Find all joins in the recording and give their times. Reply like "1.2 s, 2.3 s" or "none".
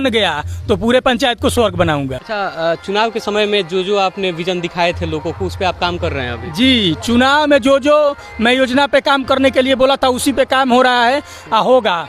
2.2 s

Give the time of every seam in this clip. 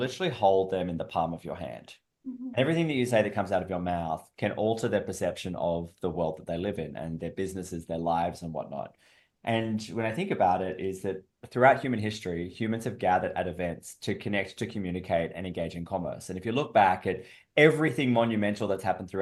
none

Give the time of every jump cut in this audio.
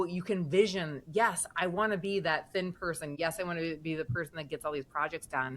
3.1 s

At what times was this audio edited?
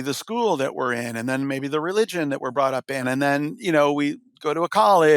3.1 s

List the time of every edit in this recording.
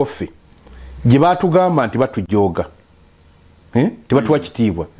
none

